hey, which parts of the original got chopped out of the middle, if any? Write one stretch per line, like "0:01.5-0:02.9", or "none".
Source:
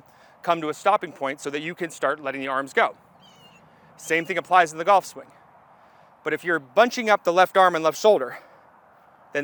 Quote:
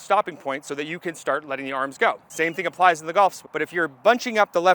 0:03.0-0:04.0
0:05.2-0:06.2